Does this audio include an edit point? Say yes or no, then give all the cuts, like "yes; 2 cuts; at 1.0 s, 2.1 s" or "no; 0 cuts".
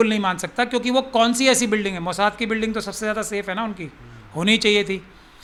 no; 0 cuts